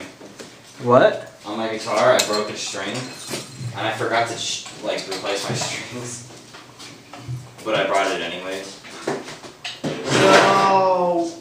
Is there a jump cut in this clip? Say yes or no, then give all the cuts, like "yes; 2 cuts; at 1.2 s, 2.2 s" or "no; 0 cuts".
no; 0 cuts